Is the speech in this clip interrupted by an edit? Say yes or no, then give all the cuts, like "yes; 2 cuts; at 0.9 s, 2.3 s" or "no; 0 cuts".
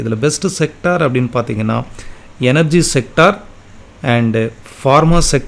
no; 0 cuts